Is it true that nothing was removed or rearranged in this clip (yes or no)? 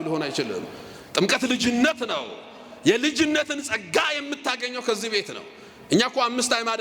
yes